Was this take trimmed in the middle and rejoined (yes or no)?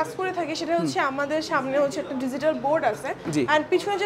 no